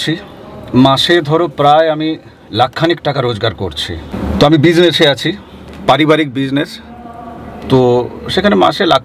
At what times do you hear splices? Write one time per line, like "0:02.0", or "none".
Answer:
0:04.5